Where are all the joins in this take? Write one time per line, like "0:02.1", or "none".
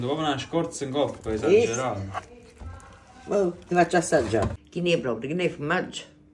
0:04.6